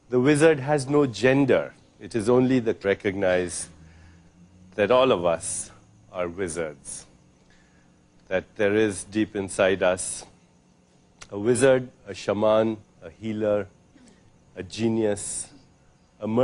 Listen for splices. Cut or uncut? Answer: uncut